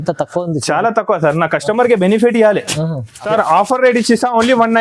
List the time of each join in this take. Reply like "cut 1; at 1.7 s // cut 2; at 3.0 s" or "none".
cut 1; at 3.1 s

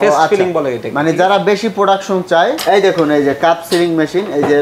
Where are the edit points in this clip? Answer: cut 1; at 2.6 s

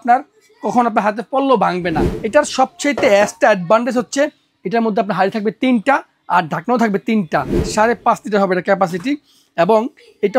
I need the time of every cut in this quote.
cut 1; at 2.1 s // cut 2; at 7.6 s

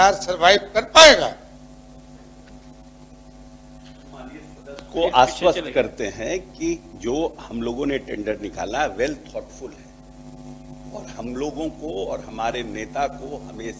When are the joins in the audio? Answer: none

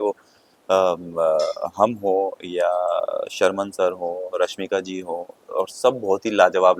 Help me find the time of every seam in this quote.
none

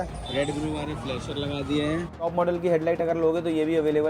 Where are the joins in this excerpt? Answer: cut 1; at 2.3 s

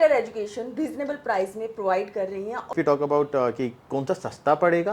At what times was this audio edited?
cut 1; at 2.7 s

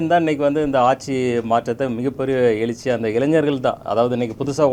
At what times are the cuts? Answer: none

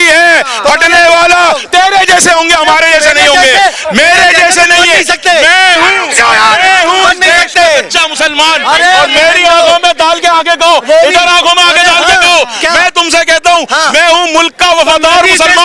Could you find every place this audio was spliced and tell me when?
none

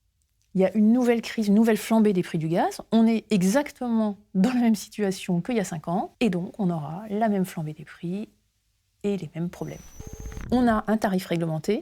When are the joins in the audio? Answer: cut 1; at 6.1 s // cut 2; at 9.9 s

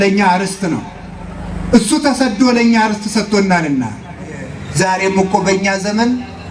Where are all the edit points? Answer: cut 1; at 4.6 s

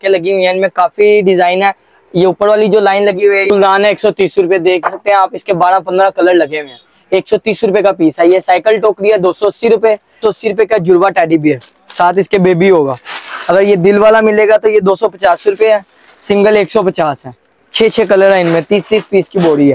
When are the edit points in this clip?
cut 1; at 3.5 s // cut 2; at 10.2 s

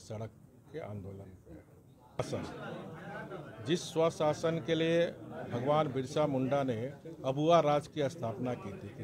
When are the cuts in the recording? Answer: cut 1; at 2.2 s

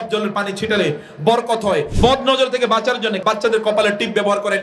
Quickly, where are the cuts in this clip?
cut 1; at 1.9 s // cut 2; at 3.2 s

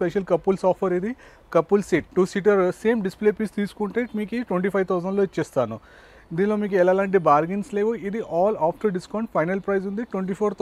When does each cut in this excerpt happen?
none

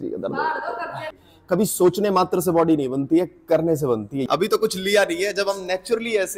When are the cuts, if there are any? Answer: cut 1; at 1.3 s // cut 2; at 4.3 s

